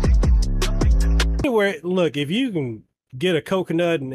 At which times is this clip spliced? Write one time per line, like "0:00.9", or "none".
0:01.4

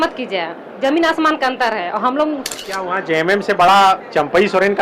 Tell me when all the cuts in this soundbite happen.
0:02.6

